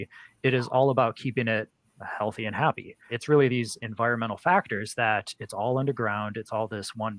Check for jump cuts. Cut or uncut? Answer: cut